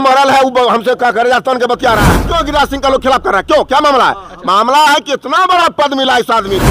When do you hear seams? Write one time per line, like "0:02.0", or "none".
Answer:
0:02.2